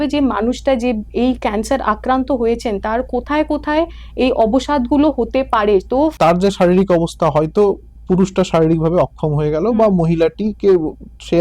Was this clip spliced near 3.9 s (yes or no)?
no